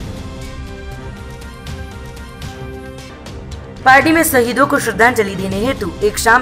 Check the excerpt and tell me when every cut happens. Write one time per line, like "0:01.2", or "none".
0:03.2